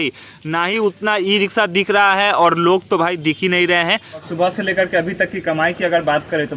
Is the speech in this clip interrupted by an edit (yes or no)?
yes